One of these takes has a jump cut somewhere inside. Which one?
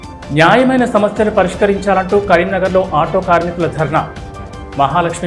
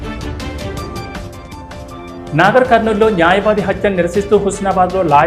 second; 1 cut; at 1.1 s

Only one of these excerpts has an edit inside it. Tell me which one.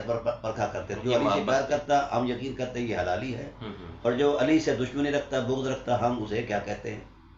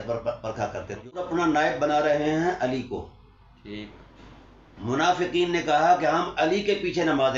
second; 1 cut; at 1.1 s

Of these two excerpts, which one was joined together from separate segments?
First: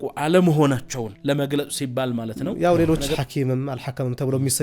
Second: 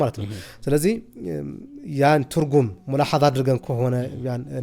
first; 2 cuts; at 1.1 s, 2.4 s

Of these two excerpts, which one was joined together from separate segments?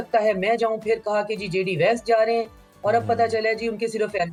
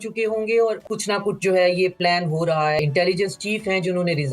second; 2 cuts; at 0.9 s, 2.8 s

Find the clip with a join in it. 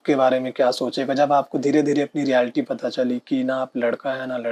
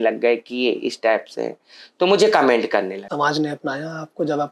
second; 1 cut; at 3.0 s

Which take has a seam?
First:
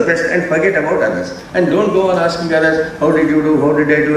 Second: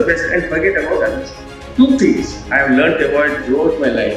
second; 1 cut; at 1.4 s

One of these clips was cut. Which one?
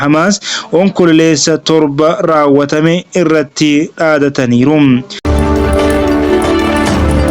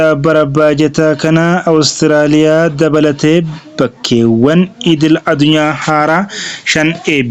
first; 1 cut; at 5.2 s

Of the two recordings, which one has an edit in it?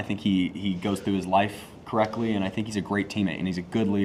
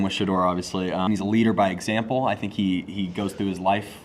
second; 1 cut; at 1.1 s

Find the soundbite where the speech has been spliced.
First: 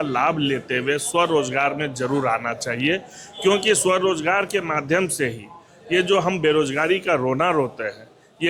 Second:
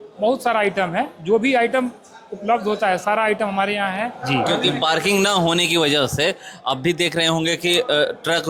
second; 1 cut; at 4.2 s

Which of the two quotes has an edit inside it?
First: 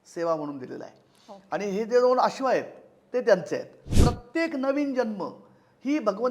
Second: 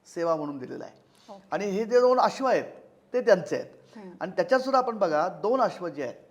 first; 1 cut; at 3.9 s

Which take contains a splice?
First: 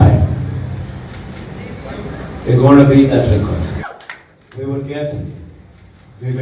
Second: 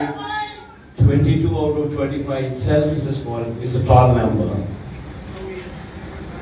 first; 1 cut; at 3.8 s

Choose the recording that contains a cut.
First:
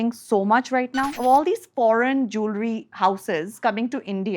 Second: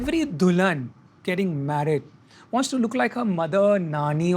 first; 1 cut; at 1.1 s

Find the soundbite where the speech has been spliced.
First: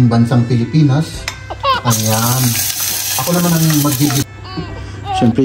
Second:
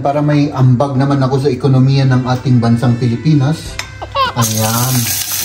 first; 1 cut; at 4.2 s

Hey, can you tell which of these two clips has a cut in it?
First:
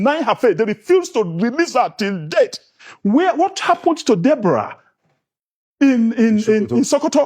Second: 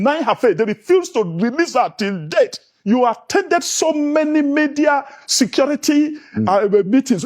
first; 1 cut; at 2.7 s

